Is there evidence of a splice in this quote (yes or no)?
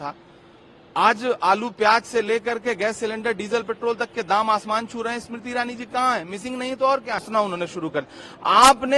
yes